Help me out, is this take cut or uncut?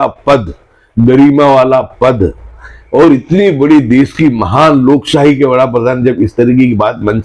uncut